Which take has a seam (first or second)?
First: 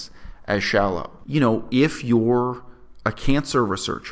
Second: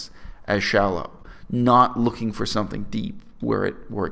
first